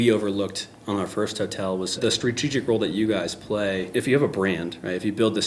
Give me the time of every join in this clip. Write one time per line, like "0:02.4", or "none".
0:02.0
0:03.8